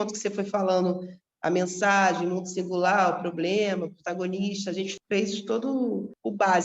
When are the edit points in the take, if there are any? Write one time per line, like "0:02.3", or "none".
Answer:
none